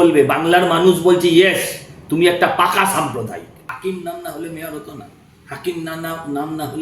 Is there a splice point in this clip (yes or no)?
yes